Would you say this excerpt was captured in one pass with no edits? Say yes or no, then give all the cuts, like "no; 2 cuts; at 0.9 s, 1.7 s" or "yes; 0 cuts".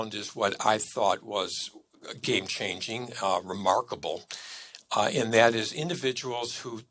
yes; 0 cuts